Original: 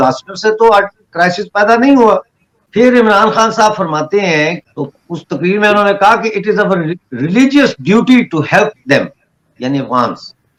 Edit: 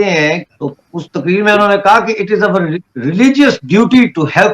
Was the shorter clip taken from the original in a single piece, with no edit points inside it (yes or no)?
yes